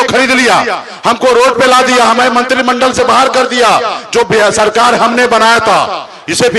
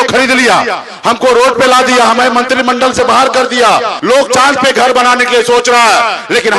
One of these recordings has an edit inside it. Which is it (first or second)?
second